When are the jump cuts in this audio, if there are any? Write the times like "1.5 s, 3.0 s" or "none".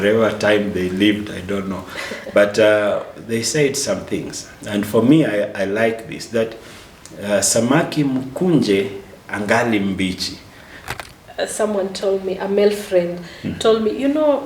10.8 s